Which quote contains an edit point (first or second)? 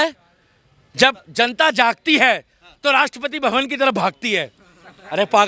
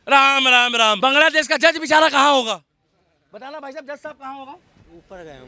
second